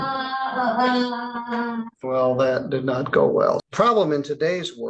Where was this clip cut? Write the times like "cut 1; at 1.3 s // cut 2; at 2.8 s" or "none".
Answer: cut 1; at 1.9 s // cut 2; at 3.6 s